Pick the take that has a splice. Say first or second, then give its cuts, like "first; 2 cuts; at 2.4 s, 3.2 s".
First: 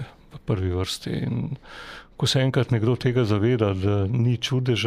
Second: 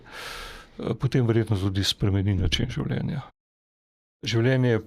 second; 1 cut; at 3.8 s